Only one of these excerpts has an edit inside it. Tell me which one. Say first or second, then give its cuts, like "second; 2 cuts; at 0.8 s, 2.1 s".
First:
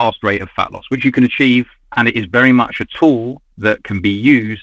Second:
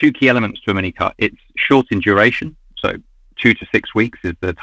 first; 1 cut; at 1.8 s